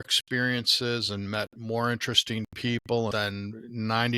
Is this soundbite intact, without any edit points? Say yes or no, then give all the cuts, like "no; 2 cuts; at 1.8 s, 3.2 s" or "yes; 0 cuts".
no; 1 cut; at 3.1 s